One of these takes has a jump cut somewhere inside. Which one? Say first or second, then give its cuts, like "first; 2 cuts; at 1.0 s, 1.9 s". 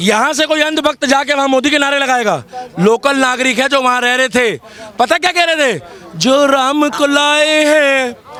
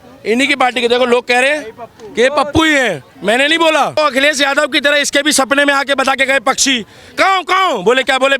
second; 1 cut; at 4.0 s